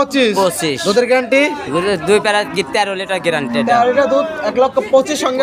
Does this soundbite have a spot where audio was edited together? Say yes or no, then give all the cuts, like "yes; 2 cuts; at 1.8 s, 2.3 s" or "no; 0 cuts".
no; 0 cuts